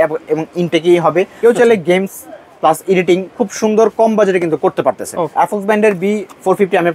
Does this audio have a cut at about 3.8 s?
no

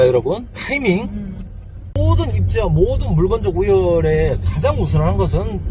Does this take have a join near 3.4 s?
no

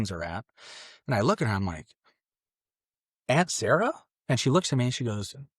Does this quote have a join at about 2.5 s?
no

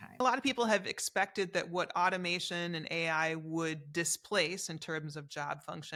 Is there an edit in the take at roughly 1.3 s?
no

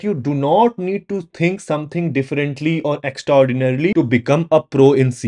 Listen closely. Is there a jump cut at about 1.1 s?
no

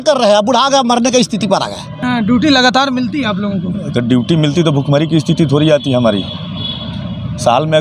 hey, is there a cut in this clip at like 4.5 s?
no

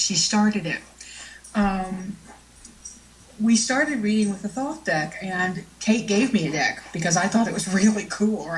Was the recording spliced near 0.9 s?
yes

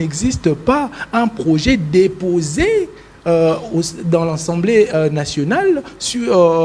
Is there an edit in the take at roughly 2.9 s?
no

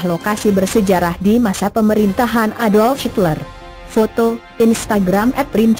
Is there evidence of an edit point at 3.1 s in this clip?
no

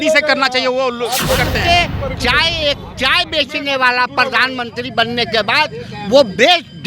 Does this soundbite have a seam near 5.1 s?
no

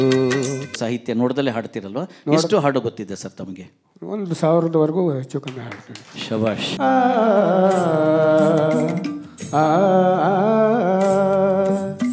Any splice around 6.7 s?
yes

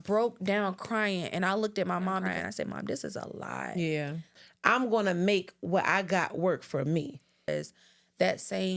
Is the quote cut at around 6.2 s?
no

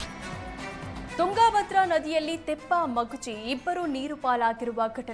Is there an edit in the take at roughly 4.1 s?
no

